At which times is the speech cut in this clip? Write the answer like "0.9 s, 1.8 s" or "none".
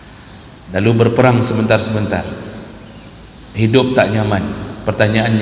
none